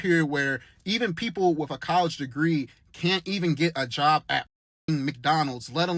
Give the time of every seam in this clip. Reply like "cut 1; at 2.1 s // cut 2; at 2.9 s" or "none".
none